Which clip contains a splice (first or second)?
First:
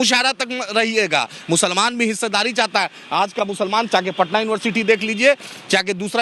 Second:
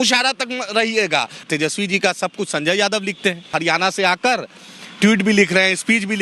second